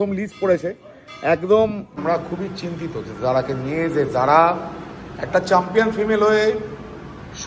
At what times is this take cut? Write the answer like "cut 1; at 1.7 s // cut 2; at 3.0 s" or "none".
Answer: cut 1; at 2.0 s